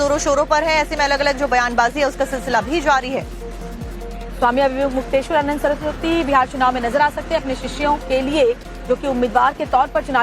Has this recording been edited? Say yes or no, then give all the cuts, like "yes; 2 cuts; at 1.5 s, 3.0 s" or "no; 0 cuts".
yes; 1 cut; at 7.2 s